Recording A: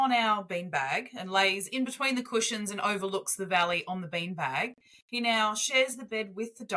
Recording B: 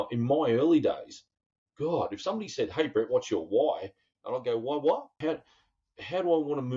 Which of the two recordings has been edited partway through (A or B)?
B